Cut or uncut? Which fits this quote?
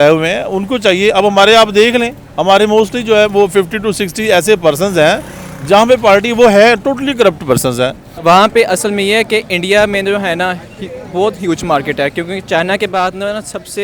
cut